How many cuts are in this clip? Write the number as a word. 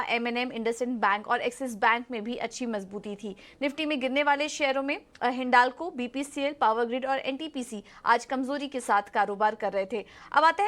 one